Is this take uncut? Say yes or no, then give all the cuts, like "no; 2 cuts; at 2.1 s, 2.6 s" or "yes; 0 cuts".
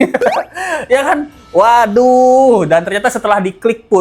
yes; 0 cuts